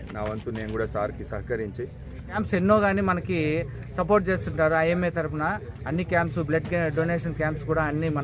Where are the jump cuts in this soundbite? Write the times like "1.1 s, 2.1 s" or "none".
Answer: 2.4 s